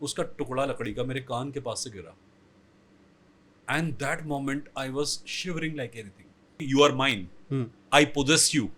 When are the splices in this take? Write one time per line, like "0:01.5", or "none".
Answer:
0:06.7